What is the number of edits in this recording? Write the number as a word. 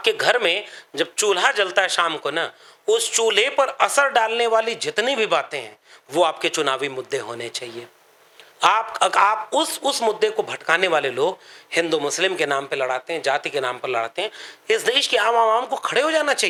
zero